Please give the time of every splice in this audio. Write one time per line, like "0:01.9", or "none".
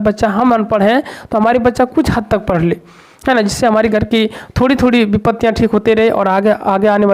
none